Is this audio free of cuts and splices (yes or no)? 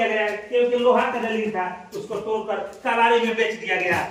yes